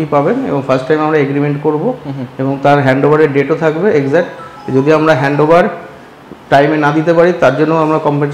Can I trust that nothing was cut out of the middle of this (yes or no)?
yes